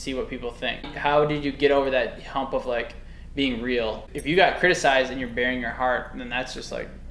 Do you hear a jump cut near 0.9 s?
yes; 2 cuts; at 0.9 s, 4.1 s

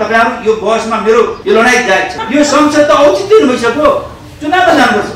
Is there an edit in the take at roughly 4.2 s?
no; 2 cuts; at 1.4 s, 2.2 s

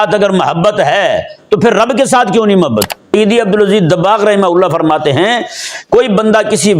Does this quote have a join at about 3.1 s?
yes; 1 cut; at 3.1 s

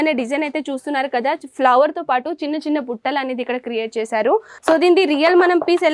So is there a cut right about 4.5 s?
yes; 1 cut; at 4.5 s

